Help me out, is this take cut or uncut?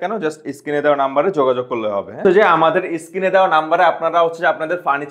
cut